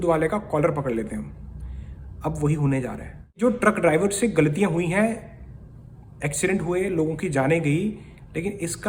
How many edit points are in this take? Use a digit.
1